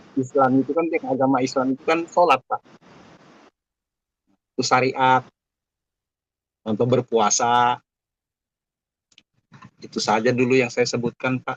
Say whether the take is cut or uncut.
uncut